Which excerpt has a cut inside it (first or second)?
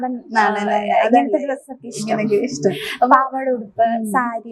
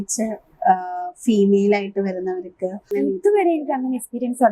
second